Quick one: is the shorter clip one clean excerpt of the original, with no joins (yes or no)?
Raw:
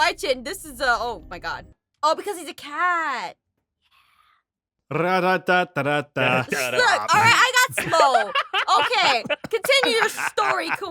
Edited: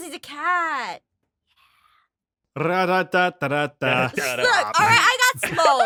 yes